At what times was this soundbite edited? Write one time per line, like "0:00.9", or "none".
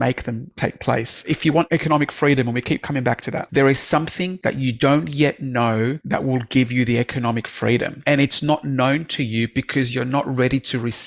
0:01.5
0:03.4
0:04.3
0:06.0
0:07.9

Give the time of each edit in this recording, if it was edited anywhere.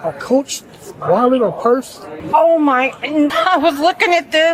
0:02.1
0:03.3

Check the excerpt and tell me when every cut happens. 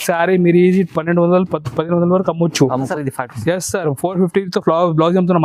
0:02.9

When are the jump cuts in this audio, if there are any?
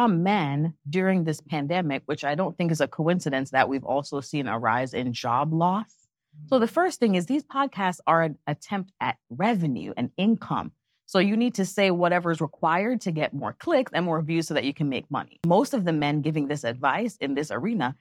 0:15.4

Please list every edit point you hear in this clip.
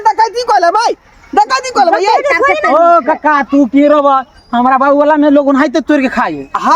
0:02.6

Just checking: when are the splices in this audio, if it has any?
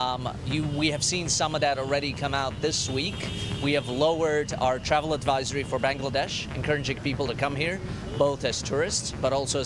none

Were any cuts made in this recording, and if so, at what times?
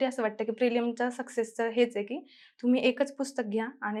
none

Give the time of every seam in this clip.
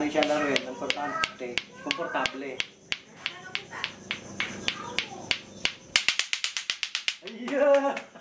0:07.3

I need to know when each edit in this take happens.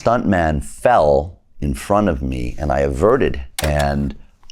0:03.5

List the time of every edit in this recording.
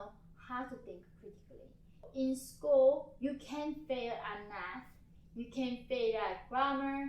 0:02.1

